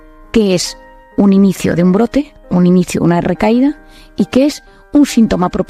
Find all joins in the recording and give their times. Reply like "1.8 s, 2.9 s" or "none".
none